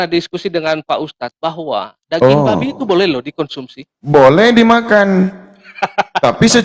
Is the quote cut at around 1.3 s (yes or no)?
no